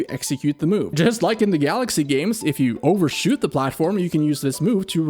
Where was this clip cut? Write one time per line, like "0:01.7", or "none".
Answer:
0:00.9